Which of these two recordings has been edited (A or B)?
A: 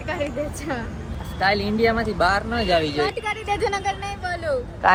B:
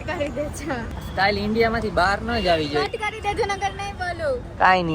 B